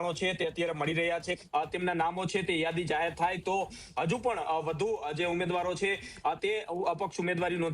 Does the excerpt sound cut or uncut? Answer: cut